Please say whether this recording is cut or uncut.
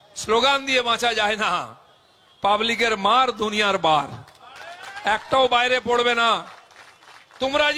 uncut